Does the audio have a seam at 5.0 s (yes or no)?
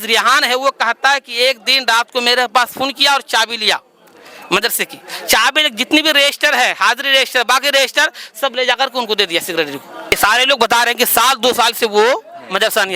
no